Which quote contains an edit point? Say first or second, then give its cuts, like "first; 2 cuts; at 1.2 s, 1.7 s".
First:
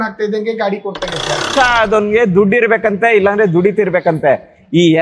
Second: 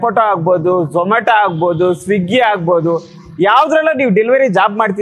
first; 1 cut; at 1.5 s